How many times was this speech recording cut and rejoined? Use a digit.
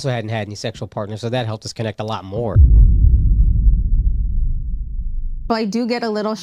0